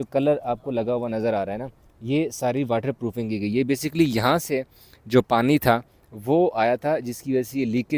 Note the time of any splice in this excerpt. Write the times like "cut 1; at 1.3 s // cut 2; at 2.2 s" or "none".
none